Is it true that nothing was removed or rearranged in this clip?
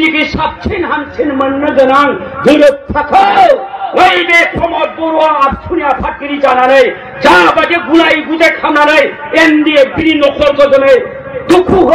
yes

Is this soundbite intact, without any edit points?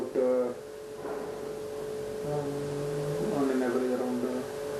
yes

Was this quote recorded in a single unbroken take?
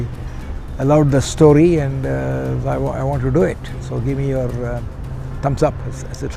yes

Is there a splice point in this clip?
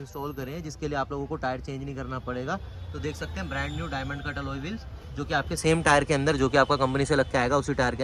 no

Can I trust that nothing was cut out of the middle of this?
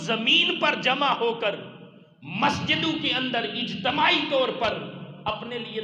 yes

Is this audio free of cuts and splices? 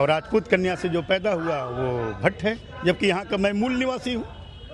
yes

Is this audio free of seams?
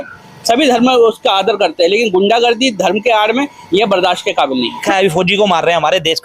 no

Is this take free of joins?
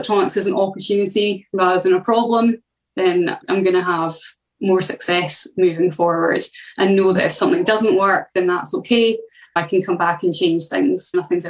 yes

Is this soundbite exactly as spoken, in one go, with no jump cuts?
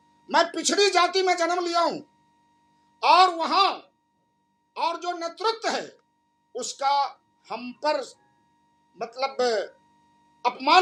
yes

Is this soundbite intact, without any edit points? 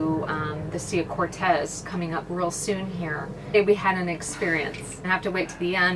no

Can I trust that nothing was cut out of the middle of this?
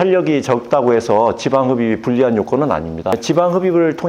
no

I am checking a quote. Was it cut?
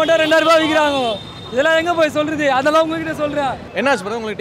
no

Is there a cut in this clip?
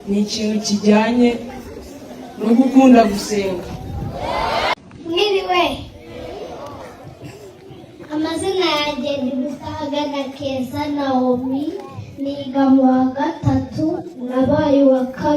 yes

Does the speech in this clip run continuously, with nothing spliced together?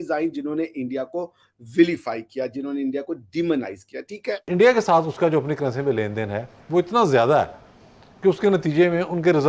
no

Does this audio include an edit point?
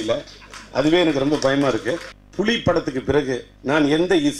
yes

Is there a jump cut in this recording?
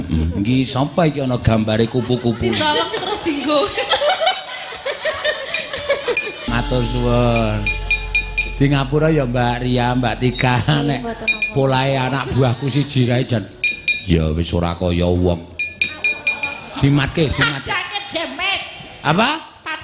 yes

